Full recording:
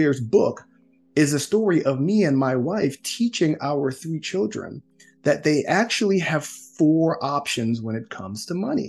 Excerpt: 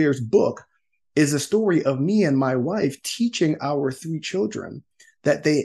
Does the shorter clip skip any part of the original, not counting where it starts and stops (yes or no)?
no